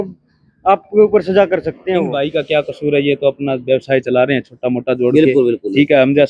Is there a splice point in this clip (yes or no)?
yes